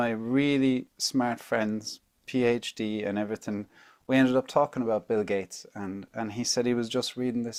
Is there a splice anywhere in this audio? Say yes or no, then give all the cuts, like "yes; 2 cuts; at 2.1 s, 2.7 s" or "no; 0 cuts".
no; 0 cuts